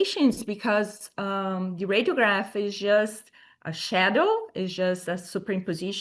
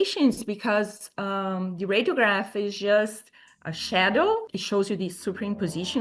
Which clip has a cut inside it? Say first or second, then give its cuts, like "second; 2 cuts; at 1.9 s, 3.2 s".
second; 1 cut; at 4.5 s